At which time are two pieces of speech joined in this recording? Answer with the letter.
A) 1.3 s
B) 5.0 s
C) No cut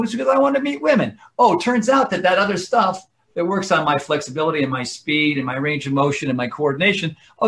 C